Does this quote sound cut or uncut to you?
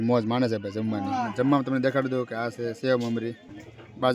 cut